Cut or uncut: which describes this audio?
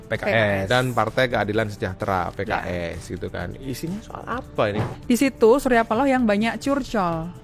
cut